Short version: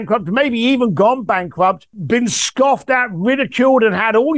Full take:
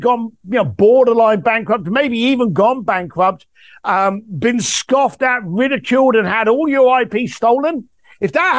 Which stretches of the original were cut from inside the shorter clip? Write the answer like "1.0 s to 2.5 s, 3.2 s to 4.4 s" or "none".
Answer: 3.5 s to 4.3 s